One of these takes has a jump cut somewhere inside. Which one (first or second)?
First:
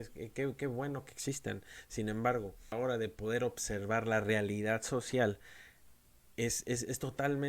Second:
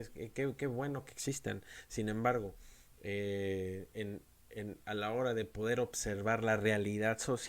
first